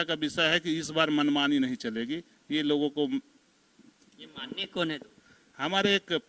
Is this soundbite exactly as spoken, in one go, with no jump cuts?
yes; 0 cuts

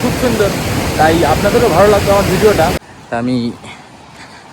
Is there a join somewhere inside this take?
yes; 1 cut; at 2.8 s

